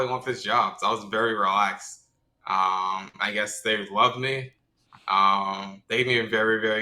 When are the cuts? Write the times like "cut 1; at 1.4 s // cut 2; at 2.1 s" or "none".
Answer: none